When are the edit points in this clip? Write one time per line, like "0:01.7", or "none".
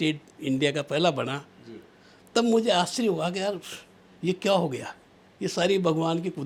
none